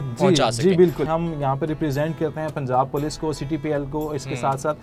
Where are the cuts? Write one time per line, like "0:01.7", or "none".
0:01.1